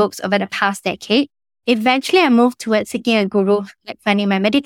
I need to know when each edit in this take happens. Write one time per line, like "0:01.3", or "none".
0:01.5